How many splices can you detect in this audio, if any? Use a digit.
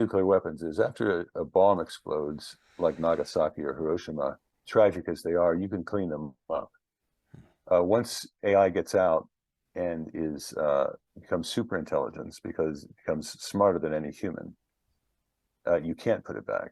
2